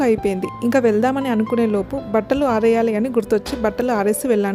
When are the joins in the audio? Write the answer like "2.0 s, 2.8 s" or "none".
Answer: none